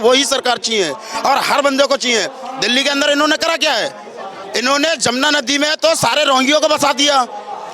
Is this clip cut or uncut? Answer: uncut